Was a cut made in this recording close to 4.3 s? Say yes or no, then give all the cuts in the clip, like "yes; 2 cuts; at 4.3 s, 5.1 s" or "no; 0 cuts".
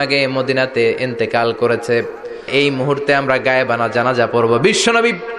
no; 1 cut; at 2.5 s